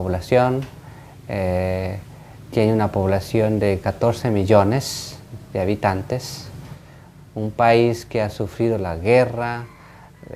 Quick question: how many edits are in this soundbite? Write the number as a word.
one